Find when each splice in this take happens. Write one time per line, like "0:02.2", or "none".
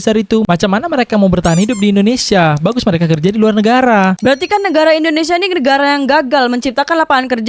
0:04.2